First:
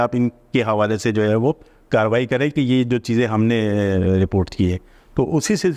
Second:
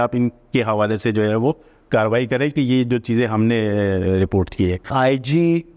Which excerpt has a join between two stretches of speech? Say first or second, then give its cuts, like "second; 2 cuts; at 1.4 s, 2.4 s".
second; 1 cut; at 4.9 s